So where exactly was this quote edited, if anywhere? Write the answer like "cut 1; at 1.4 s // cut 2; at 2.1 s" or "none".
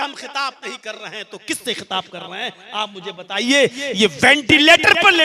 none